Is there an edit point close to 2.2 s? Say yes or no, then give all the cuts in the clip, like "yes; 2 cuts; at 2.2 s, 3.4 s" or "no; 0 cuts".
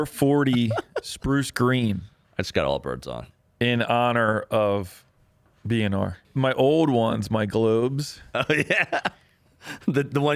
yes; 2 cuts; at 2.2 s, 6.2 s